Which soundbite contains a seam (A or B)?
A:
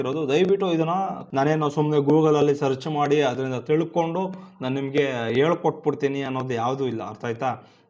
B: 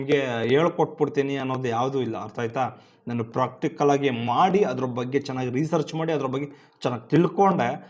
A